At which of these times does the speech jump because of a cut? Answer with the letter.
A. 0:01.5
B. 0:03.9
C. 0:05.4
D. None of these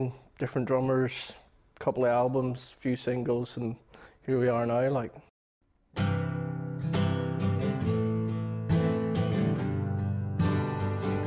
D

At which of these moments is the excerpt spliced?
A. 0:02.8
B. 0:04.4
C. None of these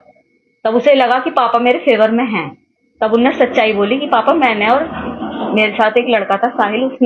C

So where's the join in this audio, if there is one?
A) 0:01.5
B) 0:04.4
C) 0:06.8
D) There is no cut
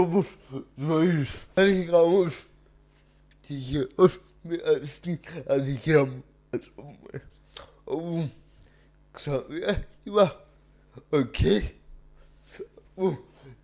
A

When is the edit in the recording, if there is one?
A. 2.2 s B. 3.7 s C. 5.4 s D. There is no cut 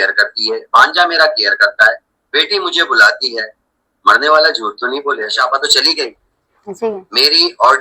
C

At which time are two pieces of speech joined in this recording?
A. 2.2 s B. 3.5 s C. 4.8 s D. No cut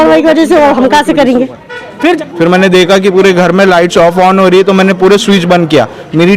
A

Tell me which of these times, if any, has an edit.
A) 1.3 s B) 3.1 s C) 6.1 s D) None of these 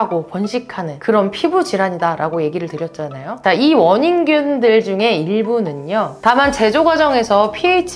C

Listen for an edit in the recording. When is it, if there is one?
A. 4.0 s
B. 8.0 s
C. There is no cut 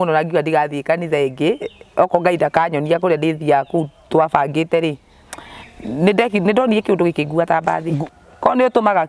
B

